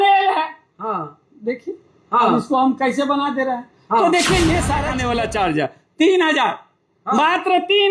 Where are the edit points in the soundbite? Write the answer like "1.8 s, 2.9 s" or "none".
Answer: 4.9 s